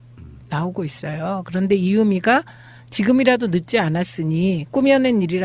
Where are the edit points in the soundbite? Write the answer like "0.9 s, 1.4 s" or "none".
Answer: 2.2 s